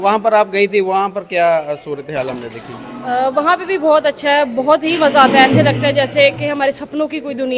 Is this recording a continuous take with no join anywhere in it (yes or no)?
yes